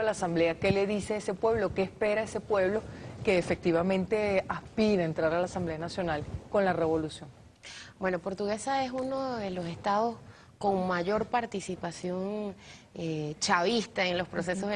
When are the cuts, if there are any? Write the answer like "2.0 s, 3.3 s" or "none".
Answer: 8.4 s